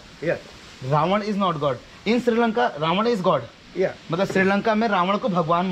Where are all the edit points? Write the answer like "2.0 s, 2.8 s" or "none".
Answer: none